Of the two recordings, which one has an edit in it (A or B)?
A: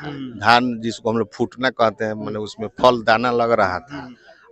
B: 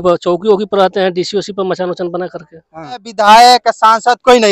B